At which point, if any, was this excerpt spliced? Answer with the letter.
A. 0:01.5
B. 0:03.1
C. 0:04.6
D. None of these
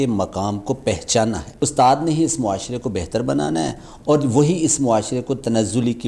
A